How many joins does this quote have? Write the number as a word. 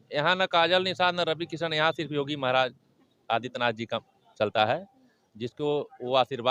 zero